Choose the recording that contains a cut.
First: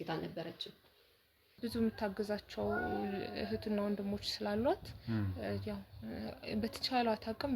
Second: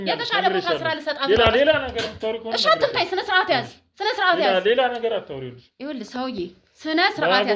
first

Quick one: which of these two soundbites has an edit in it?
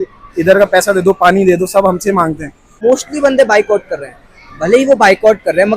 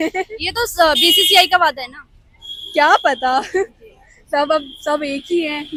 first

